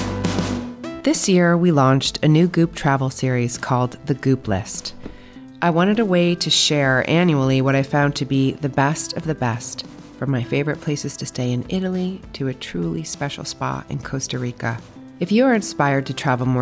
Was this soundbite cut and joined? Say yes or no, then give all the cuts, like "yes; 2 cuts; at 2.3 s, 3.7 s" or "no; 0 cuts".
yes; 1 cut; at 1.0 s